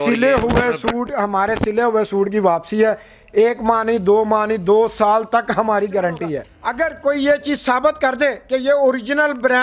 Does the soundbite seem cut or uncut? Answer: cut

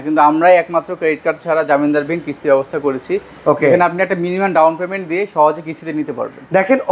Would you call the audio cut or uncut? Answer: uncut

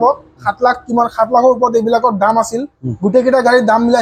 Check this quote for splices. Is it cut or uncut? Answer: uncut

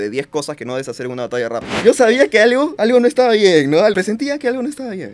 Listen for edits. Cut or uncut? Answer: cut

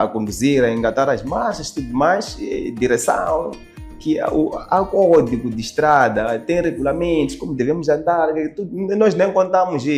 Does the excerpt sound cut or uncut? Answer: uncut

